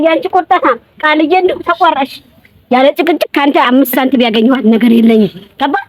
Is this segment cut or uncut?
uncut